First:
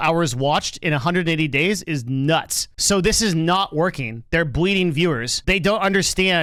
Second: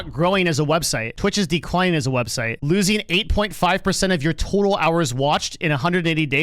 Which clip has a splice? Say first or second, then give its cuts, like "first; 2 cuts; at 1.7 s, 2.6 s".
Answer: second; 2 cuts; at 1.0 s, 2.5 s